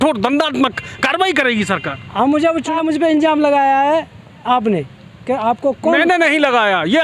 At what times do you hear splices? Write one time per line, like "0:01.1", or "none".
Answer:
0:02.7